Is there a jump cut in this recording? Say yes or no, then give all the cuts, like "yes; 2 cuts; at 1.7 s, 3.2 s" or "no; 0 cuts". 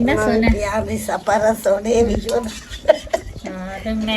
no; 0 cuts